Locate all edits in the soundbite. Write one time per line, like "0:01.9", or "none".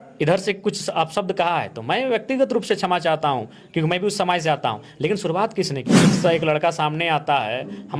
0:06.0